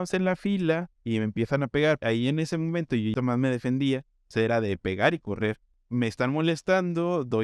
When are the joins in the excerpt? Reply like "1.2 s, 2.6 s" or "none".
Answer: 0.9 s, 2.0 s, 3.1 s, 5.7 s